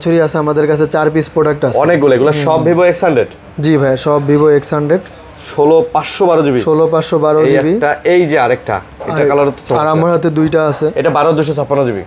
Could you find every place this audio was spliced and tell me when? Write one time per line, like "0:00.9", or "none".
none